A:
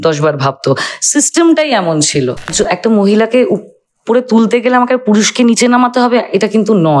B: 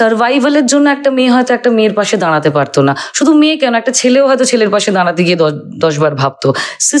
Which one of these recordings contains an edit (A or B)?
A